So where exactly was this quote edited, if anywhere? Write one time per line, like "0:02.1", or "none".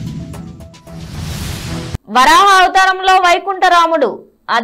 none